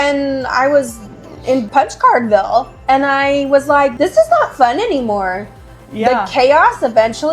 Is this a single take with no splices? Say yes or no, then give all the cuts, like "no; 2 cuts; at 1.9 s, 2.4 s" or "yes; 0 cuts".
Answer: no; 2 cuts; at 1.6 s, 3.9 s